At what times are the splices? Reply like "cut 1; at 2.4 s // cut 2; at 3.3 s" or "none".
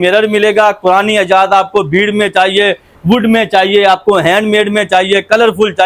none